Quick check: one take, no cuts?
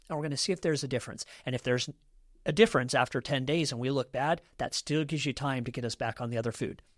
yes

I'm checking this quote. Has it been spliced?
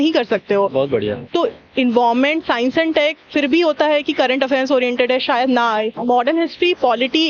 yes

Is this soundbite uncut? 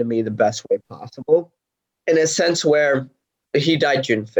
no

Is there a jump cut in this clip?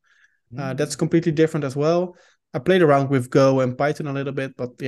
no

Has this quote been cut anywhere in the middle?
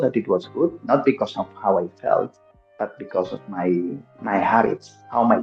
no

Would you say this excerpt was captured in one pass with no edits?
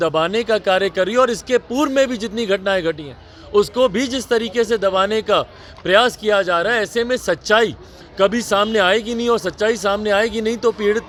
yes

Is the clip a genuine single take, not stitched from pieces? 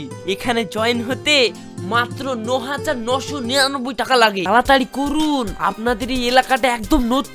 no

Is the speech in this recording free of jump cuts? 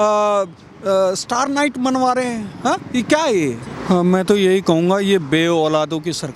no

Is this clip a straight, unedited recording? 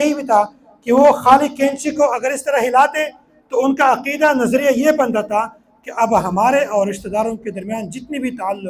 yes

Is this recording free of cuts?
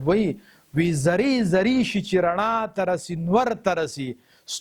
yes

